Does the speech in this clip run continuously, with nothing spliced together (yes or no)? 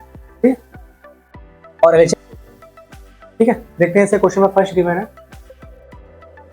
no